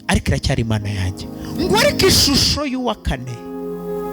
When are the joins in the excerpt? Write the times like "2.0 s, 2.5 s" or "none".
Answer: 1.5 s

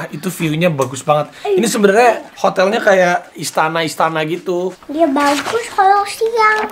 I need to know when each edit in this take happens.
3.4 s, 4.8 s

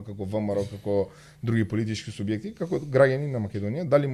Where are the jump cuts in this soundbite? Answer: none

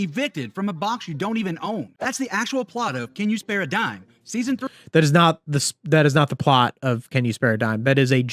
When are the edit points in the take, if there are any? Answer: 1.9 s

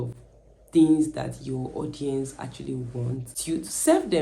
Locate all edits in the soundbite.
3.3 s

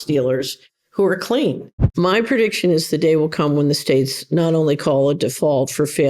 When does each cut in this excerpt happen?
1.9 s

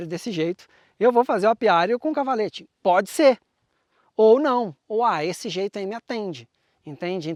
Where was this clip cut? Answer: none

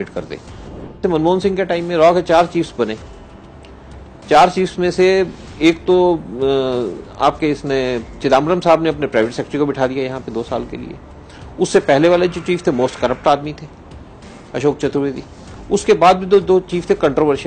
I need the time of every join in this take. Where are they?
1.0 s

